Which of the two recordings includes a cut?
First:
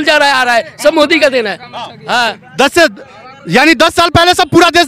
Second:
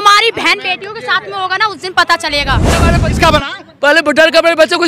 second; 1 cut; at 2.9 s

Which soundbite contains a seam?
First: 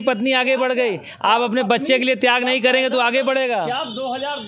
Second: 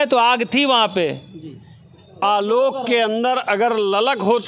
second; 1 cut; at 2.2 s

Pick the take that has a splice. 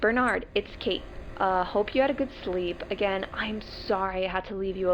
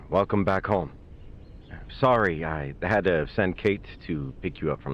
first; 1 cut; at 1.6 s

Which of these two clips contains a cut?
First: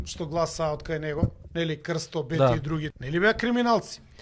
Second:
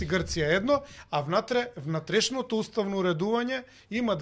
first; 2 cuts; at 1.4 s, 3.0 s

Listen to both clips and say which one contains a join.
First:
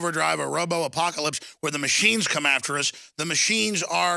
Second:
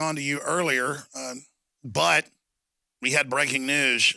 second; 1 cut; at 2.1 s

